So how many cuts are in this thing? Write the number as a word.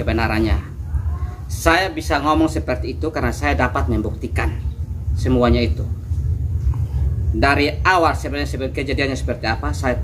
zero